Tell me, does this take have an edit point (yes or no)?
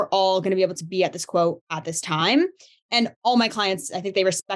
no